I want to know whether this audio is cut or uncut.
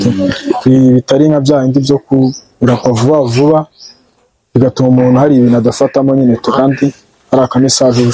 uncut